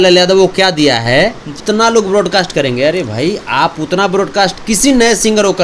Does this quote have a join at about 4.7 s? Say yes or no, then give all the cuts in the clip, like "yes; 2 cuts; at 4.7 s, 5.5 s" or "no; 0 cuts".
no; 1 cut; at 1.5 s